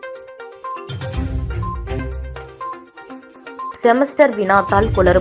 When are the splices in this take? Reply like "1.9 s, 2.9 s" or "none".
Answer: 2.1 s